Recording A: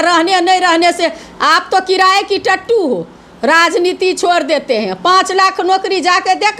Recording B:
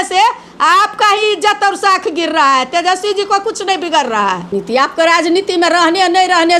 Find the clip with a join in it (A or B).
B